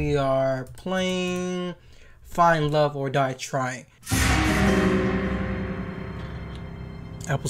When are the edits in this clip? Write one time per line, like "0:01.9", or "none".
0:03.9

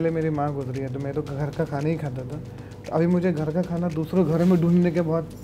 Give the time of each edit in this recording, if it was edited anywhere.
none

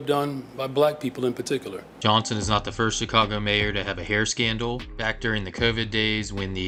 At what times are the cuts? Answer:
none

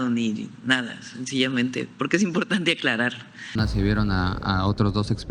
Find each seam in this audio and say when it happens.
0:03.6

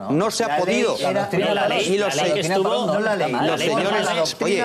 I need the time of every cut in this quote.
0:01.1

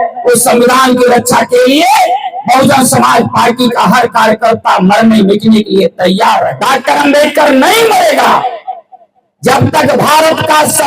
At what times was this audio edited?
0:06.5

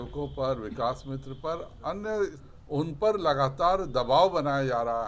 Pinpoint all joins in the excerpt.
0:02.4

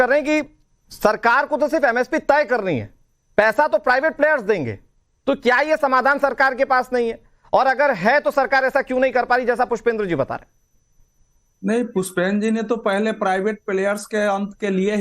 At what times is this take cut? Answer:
0:13.6

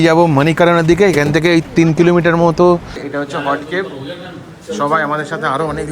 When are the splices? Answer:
0:03.0

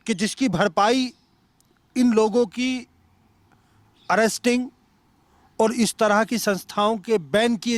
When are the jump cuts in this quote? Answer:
none

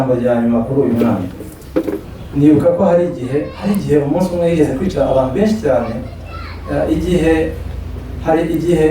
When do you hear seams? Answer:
0:02.0

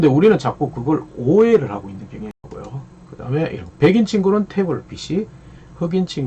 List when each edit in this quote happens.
0:02.4

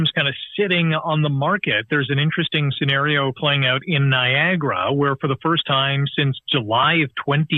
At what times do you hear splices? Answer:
none

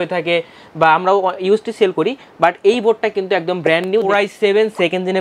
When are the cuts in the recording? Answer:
0:04.1

